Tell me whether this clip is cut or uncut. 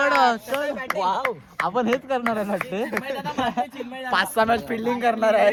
uncut